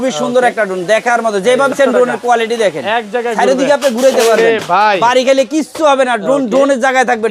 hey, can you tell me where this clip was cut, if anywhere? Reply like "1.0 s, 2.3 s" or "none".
1.7 s